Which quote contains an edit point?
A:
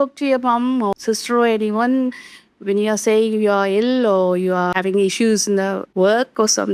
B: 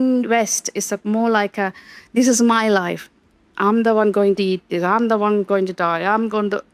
A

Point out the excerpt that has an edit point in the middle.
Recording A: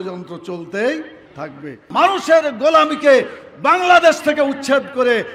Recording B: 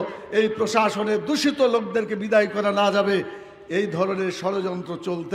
A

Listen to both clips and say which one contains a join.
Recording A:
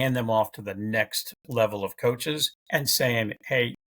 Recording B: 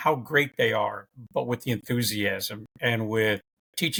A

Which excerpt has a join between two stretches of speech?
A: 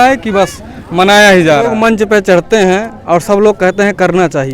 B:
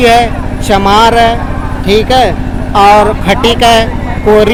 A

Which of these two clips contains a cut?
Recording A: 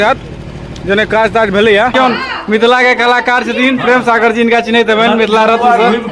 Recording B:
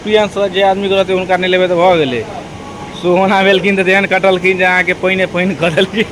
A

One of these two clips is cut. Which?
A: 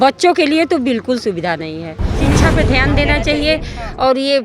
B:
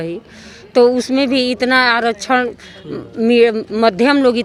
A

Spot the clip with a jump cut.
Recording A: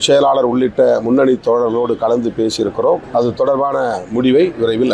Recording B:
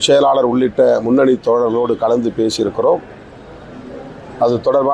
A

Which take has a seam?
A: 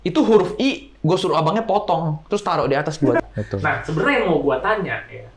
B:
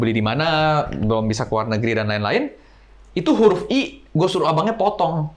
A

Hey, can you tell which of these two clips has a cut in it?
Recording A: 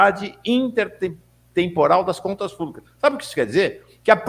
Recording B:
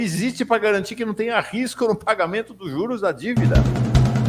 B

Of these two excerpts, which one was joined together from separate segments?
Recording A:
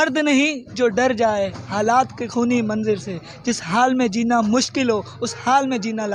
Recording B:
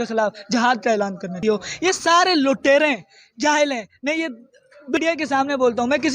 B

